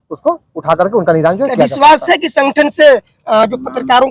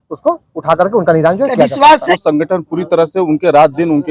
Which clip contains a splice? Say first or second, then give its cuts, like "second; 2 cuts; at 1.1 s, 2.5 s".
second; 1 cut; at 2.1 s